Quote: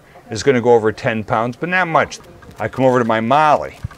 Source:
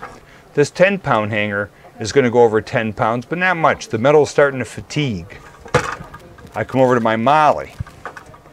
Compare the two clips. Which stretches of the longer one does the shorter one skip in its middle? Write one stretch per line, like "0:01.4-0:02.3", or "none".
0:03.8-0:06.1